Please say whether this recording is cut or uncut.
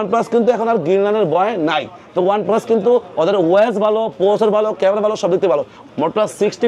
cut